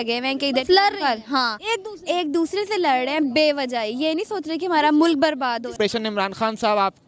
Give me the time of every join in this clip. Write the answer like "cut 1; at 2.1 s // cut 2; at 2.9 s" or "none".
cut 1; at 5.7 s